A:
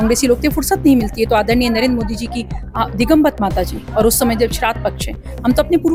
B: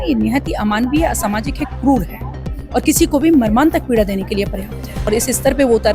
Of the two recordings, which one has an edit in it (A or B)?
B